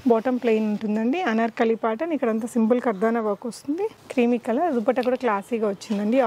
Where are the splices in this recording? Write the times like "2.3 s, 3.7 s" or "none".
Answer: 4.0 s